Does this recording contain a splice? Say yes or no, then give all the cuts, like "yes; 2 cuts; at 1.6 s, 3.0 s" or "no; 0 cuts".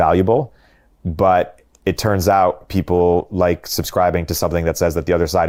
no; 0 cuts